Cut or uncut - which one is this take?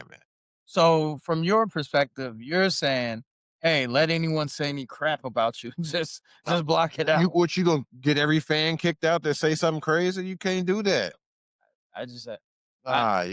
uncut